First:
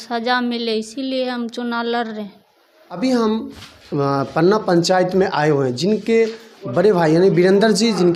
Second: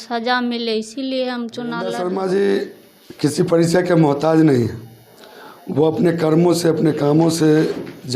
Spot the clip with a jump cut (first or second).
second